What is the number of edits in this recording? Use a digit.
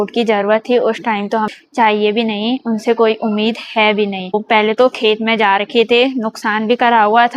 2